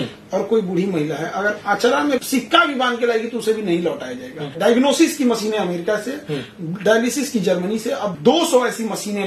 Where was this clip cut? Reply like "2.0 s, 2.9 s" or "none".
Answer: 2.2 s, 4.5 s, 8.2 s